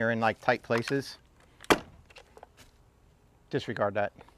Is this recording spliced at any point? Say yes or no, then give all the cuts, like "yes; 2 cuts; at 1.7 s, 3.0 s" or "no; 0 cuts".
no; 0 cuts